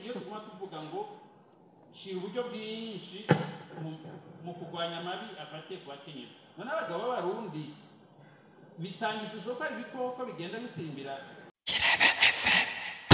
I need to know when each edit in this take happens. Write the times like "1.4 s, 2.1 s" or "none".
11.6 s